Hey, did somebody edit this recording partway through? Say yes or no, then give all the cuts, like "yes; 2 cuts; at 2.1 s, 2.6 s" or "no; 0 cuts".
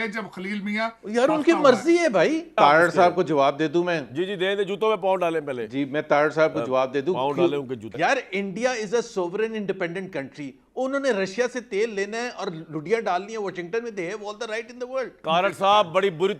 yes; 3 cuts; at 2.5 s, 7.8 s, 15.2 s